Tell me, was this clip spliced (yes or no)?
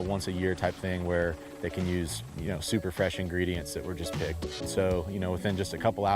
yes